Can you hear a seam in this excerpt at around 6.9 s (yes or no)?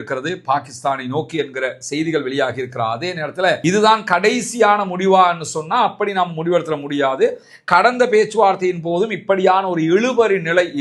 no